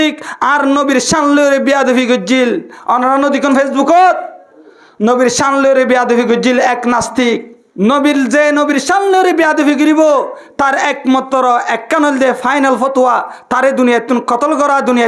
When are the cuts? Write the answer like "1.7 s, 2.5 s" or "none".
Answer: 7.6 s